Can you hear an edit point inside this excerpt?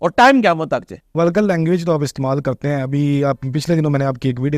yes; 1 cut; at 1.0 s

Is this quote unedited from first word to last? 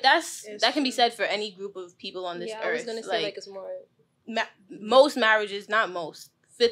yes; 0 cuts

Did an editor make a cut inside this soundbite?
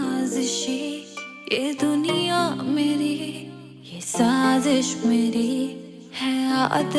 no; 0 cuts

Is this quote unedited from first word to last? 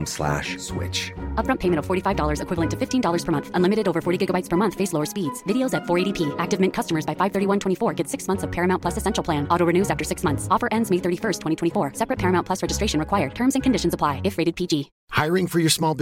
yes; 0 cuts

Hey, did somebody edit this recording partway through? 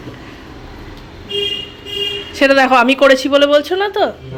no; 0 cuts

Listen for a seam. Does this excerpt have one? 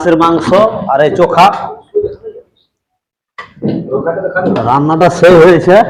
no; 0 cuts

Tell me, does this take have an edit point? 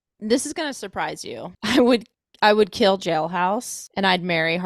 yes; 2 cuts; at 1.5 s, 3.8 s

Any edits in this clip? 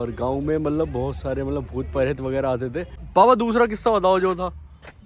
yes; 1 cut; at 3.0 s

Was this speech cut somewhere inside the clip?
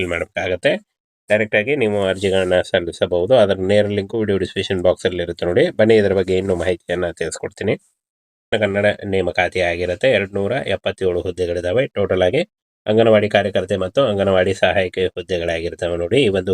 yes; 1 cut; at 8.5 s

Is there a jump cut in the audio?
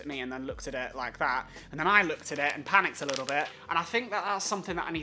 yes; 1 cut; at 3.6 s

